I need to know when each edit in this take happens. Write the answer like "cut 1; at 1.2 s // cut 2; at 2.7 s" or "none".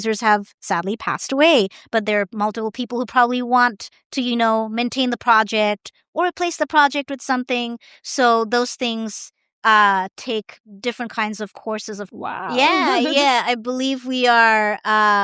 cut 1; at 12.1 s